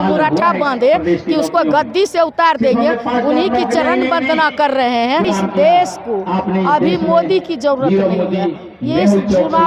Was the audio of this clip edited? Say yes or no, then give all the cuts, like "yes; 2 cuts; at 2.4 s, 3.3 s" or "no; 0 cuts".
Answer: yes; 1 cut; at 5.2 s